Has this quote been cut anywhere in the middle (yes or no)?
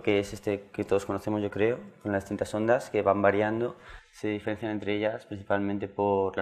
yes